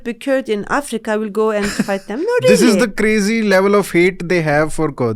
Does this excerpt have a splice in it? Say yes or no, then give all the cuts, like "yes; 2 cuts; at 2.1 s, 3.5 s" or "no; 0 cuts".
no; 0 cuts